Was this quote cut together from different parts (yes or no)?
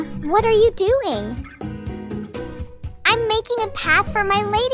no